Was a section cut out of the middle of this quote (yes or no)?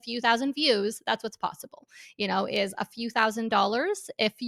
no